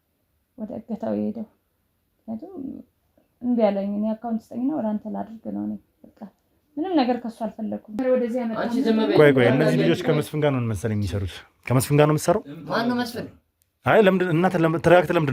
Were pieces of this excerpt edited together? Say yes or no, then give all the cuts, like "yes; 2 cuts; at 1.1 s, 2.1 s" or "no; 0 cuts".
yes; 1 cut; at 8.0 s